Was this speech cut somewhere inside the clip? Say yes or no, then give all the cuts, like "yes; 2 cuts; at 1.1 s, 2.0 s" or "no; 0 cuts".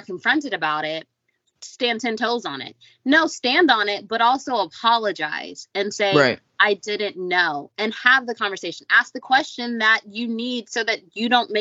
no; 0 cuts